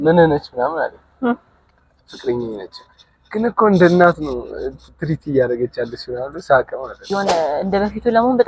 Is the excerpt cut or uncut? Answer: cut